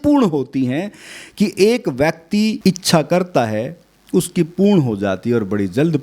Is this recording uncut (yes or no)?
no